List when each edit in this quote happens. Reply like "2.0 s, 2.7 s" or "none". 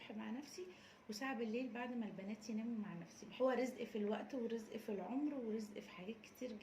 3.2 s